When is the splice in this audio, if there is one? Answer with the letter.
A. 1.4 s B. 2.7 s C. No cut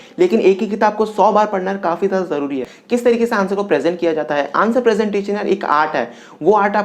B